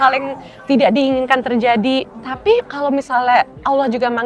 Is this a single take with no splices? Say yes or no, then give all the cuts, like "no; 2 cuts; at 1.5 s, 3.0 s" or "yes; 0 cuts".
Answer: no; 1 cut; at 2.5 s